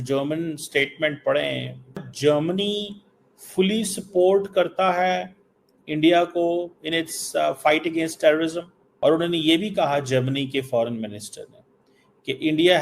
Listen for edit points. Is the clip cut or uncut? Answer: cut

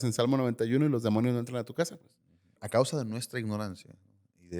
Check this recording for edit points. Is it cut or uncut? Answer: cut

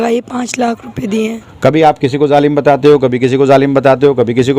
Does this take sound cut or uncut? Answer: cut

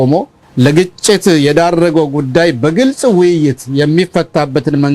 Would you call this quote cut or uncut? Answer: uncut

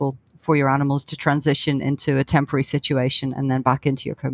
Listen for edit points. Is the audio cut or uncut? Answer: uncut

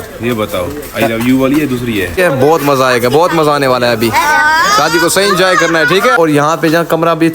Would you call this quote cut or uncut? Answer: cut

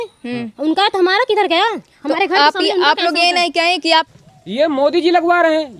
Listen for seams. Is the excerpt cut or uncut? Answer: cut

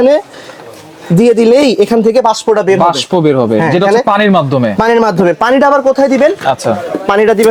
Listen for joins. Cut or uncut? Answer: uncut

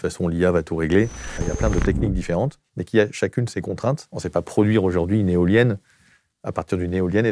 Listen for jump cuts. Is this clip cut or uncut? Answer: cut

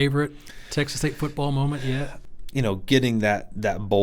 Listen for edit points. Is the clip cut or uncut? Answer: cut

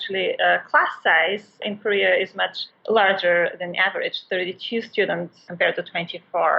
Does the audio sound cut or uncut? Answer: cut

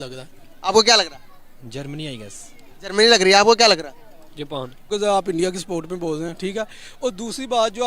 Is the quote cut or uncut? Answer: cut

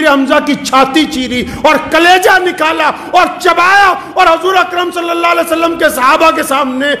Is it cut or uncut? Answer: uncut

